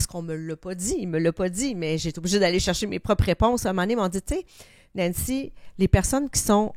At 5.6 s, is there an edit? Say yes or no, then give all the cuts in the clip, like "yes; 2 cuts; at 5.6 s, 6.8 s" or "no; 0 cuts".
no; 0 cuts